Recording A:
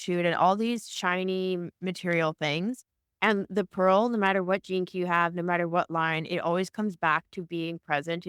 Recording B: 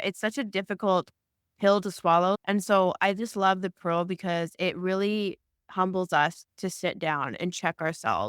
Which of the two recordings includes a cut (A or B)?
B